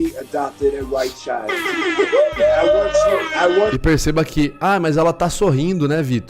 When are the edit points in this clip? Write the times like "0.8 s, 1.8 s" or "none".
2.2 s